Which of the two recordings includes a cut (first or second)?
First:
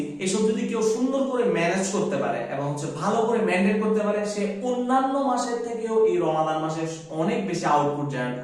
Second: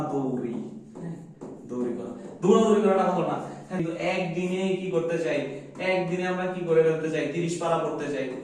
second